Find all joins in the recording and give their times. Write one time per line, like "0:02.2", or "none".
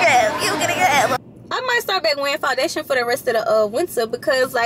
0:01.1